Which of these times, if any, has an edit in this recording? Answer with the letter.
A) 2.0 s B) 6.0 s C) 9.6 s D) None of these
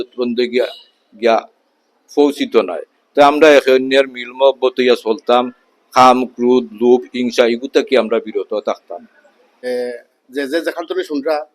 C